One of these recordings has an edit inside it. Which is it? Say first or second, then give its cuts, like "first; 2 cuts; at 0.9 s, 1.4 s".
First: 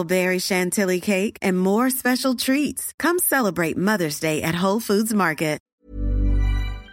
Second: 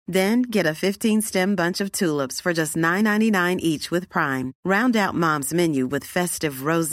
first; 1 cut; at 5.6 s